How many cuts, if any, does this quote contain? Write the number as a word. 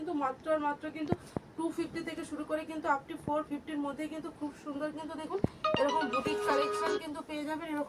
zero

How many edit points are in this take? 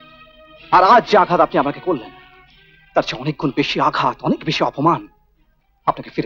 zero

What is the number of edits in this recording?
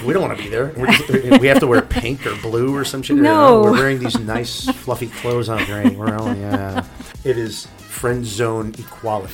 one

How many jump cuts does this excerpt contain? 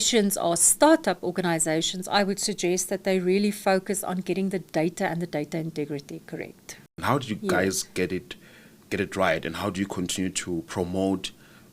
one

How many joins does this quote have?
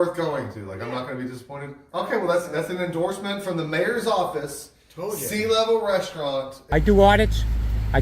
one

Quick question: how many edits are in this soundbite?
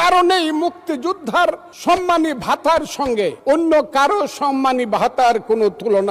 two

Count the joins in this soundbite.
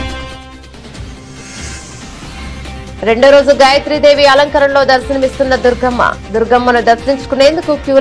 two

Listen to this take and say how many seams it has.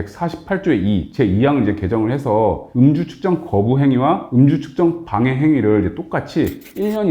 one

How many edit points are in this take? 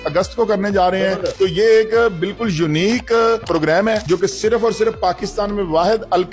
one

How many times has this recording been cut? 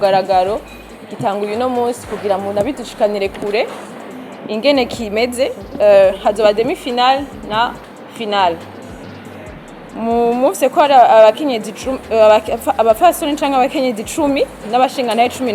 zero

